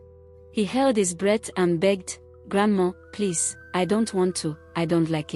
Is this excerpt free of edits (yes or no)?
yes